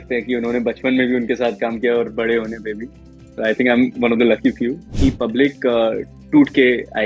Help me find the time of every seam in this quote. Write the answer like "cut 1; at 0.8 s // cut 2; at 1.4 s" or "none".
cut 1; at 4.8 s